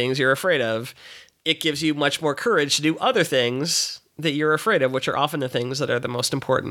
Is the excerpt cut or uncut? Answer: uncut